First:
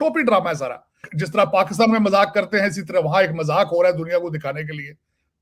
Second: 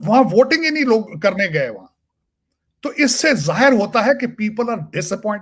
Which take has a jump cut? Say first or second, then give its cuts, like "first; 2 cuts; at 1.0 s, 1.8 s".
first; 1 cut; at 1.1 s